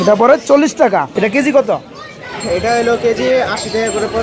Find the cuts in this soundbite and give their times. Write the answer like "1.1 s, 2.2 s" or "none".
1.1 s